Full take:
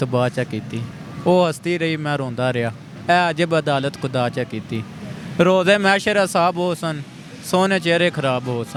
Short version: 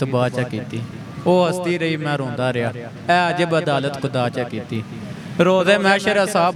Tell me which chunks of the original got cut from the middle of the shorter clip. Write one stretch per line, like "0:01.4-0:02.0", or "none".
none